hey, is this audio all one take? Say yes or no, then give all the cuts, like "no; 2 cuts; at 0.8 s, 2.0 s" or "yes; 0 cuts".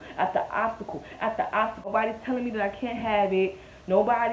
no; 1 cut; at 1.9 s